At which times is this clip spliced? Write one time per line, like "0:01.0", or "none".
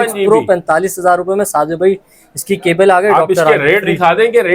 none